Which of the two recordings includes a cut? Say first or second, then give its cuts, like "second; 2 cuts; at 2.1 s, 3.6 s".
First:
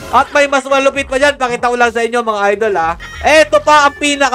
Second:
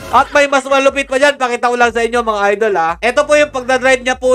first; 1 cut; at 3.0 s